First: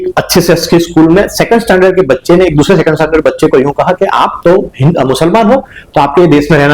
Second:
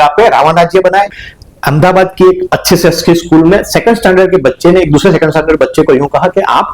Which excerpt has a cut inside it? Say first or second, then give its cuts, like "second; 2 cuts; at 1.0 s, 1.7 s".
second; 1 cut; at 1.1 s